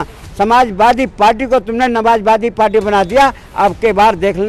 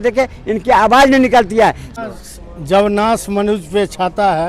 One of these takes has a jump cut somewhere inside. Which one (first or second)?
second